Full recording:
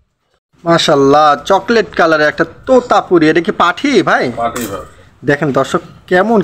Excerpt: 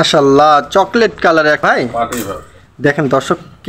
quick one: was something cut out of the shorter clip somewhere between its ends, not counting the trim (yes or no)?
yes